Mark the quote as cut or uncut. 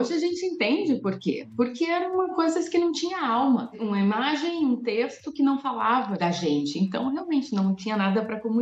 uncut